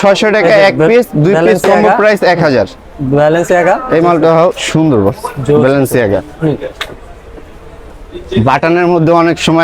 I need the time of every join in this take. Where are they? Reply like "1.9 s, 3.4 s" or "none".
none